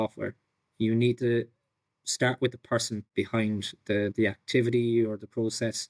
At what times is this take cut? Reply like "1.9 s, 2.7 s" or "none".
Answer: 3.1 s